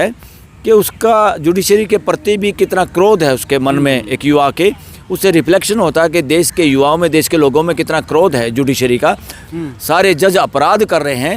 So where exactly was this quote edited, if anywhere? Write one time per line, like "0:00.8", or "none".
0:09.4